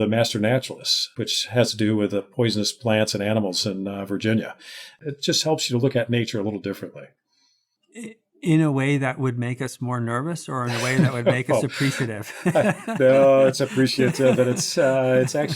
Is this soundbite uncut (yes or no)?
no